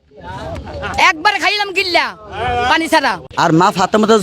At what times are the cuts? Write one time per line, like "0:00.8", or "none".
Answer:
0:03.2